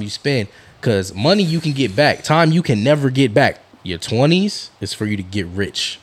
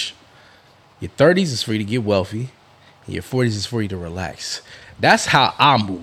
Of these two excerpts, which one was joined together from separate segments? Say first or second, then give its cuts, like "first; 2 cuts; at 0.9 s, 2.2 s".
first; 1 cut; at 3.6 s